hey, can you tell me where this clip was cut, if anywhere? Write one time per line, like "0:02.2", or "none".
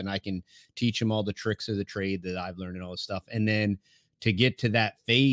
none